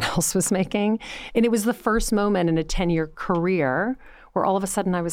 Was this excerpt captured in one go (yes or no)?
no